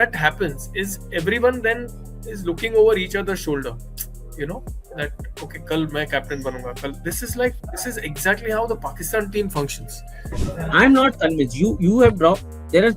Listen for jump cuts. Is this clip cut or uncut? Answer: uncut